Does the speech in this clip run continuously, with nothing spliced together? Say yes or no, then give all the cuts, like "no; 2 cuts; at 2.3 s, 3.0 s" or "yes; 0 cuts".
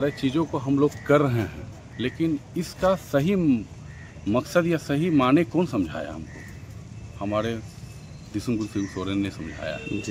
yes; 0 cuts